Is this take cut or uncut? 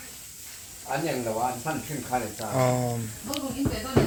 uncut